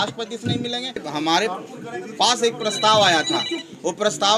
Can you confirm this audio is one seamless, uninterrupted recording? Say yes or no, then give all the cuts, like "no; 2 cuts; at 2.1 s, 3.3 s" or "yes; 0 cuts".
no; 1 cut; at 1.0 s